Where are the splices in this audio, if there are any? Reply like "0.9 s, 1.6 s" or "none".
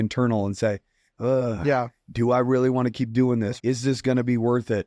3.5 s

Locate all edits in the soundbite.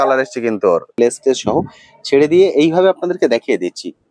1.0 s

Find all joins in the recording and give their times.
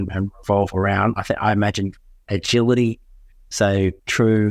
none

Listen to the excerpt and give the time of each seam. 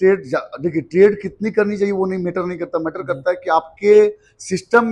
none

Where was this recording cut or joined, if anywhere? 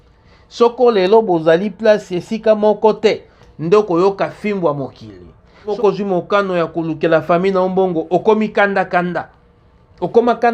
5.7 s

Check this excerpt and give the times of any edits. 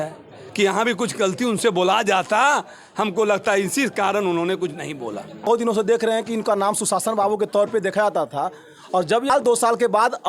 5.5 s, 9.3 s

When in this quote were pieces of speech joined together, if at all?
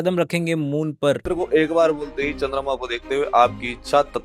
1.2 s

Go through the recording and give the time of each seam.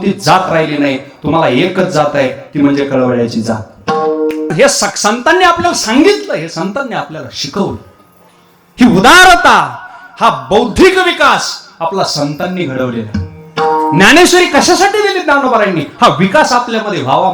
4.5 s

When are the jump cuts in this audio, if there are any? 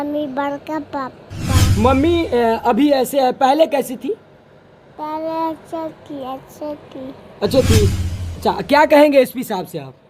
1.7 s, 8.0 s

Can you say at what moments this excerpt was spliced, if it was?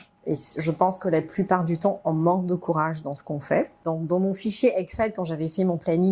3.8 s

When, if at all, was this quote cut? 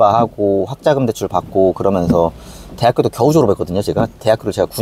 none

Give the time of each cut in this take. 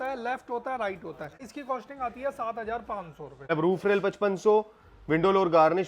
1.5 s, 3.5 s

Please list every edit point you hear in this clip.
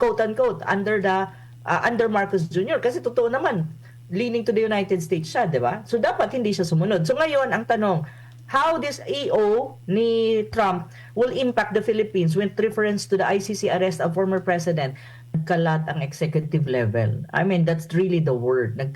15.3 s

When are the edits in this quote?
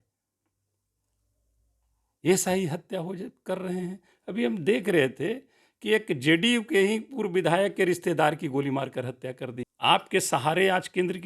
9.6 s

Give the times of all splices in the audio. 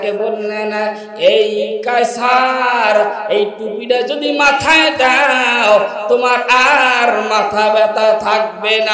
none

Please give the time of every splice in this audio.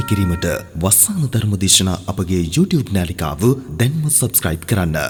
none

